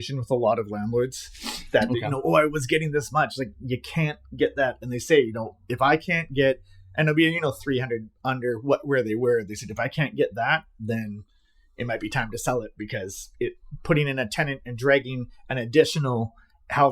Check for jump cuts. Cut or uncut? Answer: uncut